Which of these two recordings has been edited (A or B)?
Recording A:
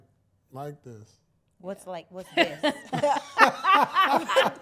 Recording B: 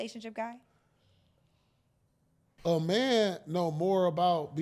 B